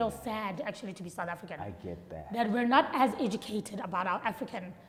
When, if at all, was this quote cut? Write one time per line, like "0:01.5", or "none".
none